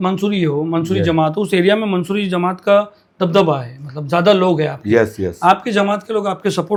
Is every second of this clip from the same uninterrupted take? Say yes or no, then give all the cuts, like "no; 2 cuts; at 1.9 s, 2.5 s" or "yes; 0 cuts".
yes; 0 cuts